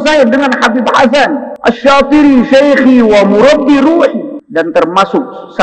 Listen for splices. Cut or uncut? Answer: cut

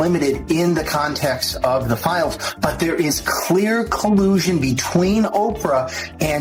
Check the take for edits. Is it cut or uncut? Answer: uncut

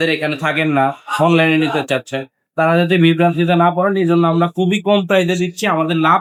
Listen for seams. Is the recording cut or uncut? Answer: uncut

